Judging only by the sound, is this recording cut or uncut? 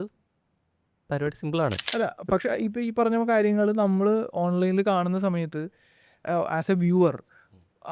cut